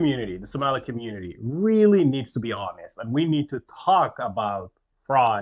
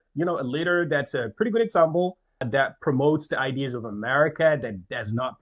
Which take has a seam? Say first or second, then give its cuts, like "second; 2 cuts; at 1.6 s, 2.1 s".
second; 1 cut; at 2.4 s